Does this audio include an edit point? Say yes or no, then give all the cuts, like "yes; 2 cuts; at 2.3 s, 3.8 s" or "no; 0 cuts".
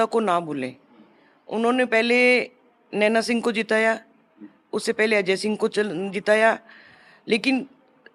no; 0 cuts